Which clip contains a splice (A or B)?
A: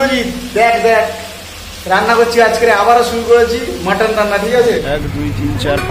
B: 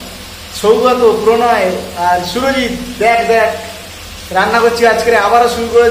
A